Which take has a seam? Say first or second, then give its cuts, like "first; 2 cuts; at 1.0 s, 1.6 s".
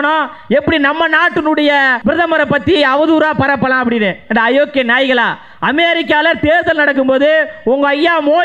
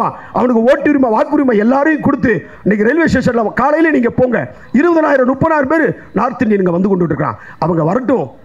first; 1 cut; at 1.9 s